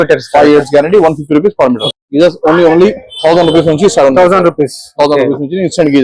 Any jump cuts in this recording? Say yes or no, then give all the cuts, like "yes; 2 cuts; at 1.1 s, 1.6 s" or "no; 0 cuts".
yes; 1 cut; at 1.9 s